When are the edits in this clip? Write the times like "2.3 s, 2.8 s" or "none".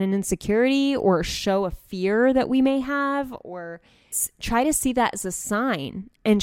4.2 s